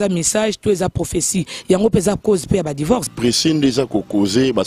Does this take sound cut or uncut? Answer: cut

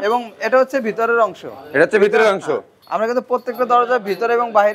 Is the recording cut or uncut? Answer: uncut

